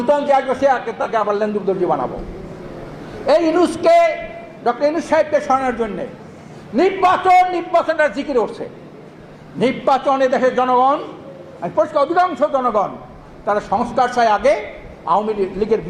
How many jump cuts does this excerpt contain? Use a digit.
0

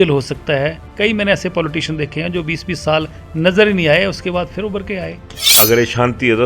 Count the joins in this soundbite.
1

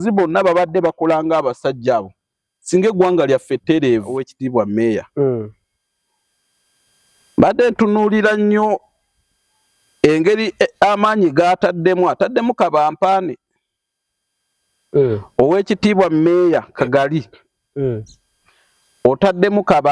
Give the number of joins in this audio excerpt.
1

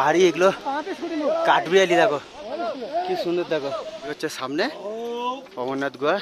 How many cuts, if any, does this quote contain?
1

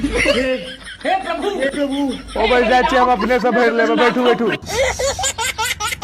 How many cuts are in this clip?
1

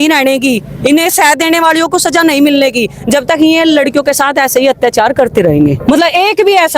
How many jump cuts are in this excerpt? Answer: 1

